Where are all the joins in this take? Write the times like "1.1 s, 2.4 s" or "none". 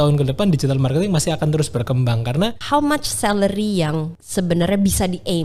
2.6 s, 4.2 s